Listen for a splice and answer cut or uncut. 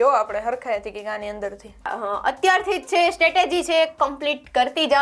cut